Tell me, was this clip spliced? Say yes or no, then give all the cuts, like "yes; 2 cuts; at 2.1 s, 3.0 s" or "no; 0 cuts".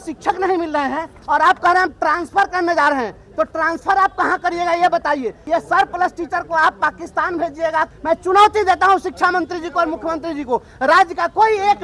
yes; 3 cuts; at 1.1 s, 5.4 s, 7.9 s